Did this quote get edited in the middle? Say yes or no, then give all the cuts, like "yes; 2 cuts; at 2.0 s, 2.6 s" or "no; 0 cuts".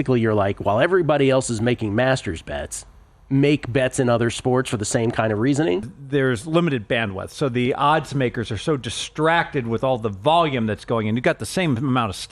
yes; 1 cut; at 5.9 s